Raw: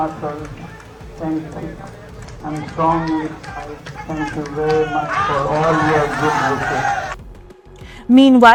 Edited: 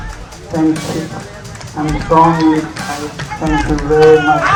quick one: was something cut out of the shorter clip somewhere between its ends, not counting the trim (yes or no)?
no